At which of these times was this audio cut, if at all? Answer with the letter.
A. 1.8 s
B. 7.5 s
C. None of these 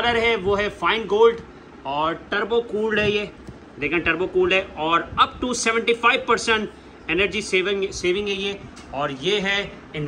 C